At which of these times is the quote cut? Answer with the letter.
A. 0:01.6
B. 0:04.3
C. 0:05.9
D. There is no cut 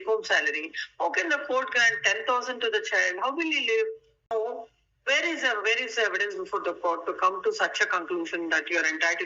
B